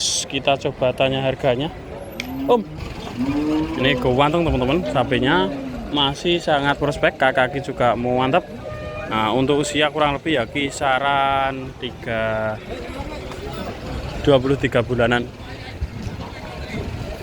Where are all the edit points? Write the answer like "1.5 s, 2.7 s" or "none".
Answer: 2.7 s